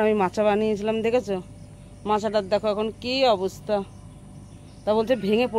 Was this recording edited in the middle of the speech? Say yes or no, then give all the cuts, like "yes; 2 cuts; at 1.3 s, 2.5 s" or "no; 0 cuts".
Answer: no; 0 cuts